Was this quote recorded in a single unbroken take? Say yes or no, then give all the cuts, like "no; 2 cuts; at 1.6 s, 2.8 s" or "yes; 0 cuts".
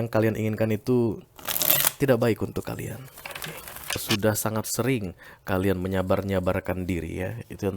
no; 1 cut; at 4.1 s